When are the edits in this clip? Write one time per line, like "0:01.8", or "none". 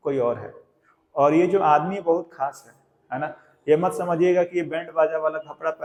none